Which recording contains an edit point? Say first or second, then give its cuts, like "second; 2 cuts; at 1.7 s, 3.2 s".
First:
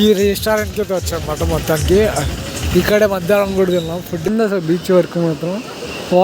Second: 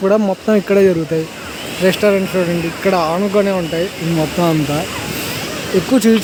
first; 1 cut; at 4.3 s